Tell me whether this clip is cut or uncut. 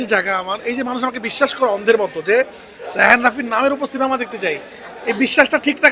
uncut